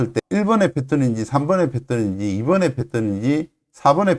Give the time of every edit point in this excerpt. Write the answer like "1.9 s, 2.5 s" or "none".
none